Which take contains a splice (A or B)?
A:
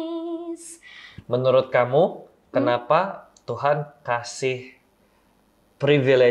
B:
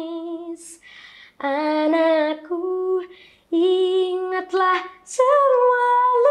A